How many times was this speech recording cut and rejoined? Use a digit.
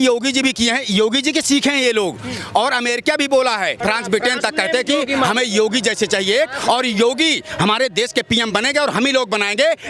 1